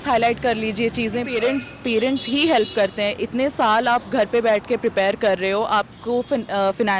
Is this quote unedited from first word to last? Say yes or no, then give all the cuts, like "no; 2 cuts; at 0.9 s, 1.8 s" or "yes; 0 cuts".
no; 1 cut; at 1.3 s